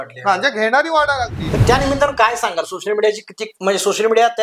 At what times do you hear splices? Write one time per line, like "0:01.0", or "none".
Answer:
0:01.6